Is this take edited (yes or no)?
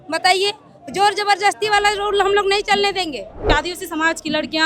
yes